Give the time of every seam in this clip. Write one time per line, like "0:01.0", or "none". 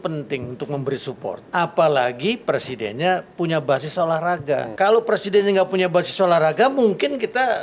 0:01.4
0:04.7